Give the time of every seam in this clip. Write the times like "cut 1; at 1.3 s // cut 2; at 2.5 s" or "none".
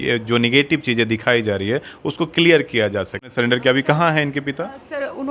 cut 1; at 3.3 s

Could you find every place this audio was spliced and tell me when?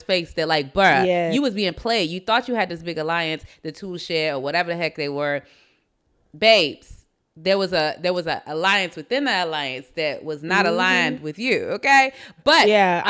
none

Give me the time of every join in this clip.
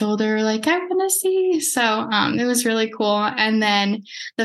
none

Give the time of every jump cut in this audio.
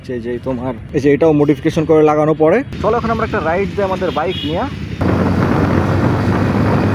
cut 1; at 0.8 s // cut 2; at 2.7 s // cut 3; at 5.0 s

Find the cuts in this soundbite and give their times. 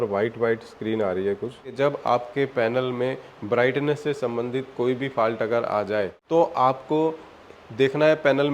cut 1; at 1.7 s // cut 2; at 6.2 s

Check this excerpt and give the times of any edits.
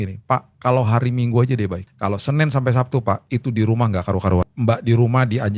cut 1; at 1.9 s // cut 2; at 4.5 s

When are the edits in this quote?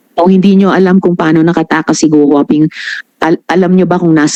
none

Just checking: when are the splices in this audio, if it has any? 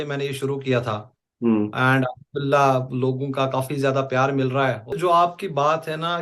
cut 1; at 4.9 s

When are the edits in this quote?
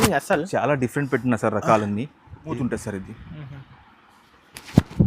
cut 1; at 2.4 s

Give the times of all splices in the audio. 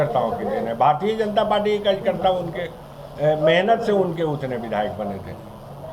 none

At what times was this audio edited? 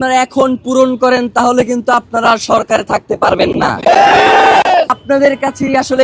cut 1; at 5.0 s

